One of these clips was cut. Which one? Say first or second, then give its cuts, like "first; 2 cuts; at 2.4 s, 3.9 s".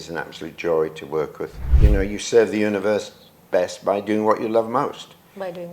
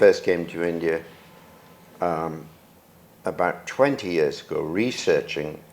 first; 1 cut; at 1.6 s